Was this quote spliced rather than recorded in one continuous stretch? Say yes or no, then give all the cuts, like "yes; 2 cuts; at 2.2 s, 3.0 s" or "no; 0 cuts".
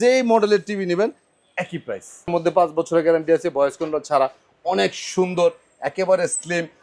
yes; 1 cut; at 2.3 s